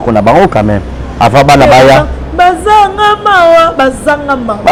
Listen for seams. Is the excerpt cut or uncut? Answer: uncut